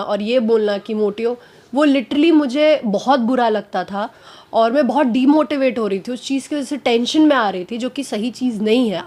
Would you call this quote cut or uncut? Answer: uncut